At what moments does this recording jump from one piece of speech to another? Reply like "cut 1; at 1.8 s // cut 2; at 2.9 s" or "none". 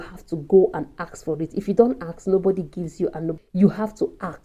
cut 1; at 3.3 s